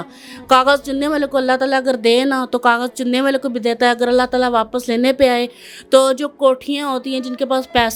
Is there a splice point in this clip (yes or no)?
no